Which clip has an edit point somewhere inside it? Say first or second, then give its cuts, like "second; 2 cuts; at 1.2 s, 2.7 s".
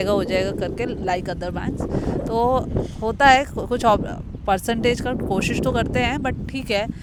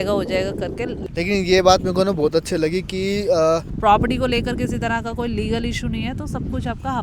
second; 2 cuts; at 1.0 s, 3.7 s